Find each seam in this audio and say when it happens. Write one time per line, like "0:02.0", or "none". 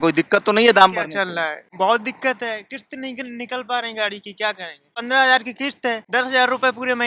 0:01.6
0:05.0
0:06.0